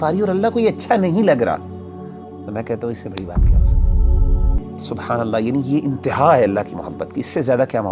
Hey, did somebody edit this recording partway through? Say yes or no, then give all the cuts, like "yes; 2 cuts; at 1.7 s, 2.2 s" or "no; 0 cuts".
yes; 1 cut; at 4.6 s